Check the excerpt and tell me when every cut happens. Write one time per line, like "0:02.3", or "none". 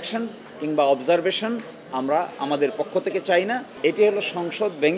0:03.6